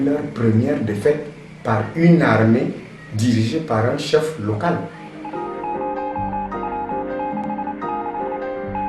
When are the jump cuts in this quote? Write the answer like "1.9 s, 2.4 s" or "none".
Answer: 5.2 s